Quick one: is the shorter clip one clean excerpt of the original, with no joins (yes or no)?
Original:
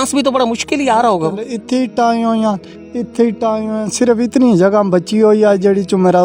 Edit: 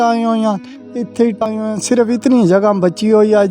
no